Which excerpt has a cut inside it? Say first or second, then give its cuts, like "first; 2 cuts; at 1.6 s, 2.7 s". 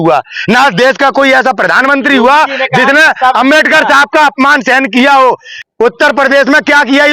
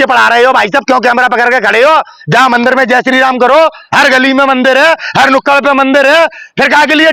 first; 1 cut; at 5.5 s